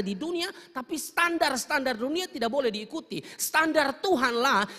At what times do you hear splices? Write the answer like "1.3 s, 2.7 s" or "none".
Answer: none